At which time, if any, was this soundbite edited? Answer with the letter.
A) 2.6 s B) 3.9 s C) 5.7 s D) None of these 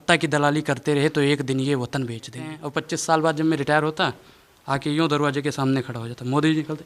A